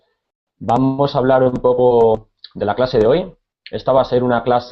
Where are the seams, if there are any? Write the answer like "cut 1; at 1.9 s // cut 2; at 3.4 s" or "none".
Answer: cut 1; at 1.8 s